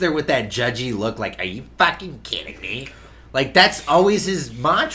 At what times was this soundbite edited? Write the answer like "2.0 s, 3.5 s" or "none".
none